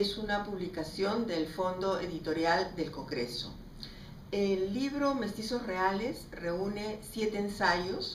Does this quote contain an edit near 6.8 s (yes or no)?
yes